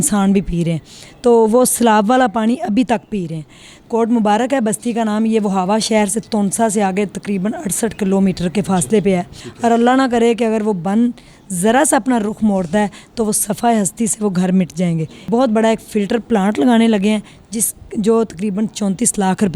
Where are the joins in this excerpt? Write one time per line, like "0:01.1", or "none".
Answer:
0:09.4
0:15.1